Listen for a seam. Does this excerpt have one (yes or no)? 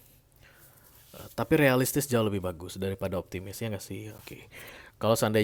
no